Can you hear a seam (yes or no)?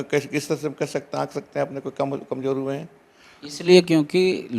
no